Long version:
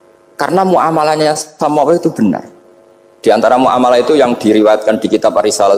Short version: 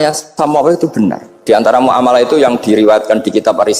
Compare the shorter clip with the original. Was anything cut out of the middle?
yes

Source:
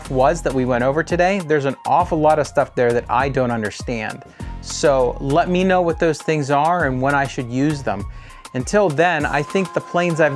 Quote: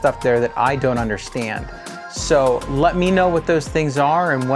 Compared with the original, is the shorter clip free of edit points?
yes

